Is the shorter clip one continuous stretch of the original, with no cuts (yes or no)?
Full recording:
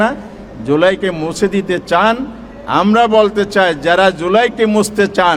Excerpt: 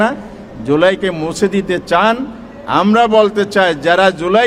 yes